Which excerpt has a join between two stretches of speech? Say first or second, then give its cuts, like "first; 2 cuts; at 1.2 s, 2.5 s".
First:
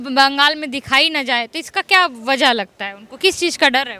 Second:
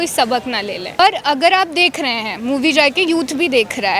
second; 1 cut; at 1.0 s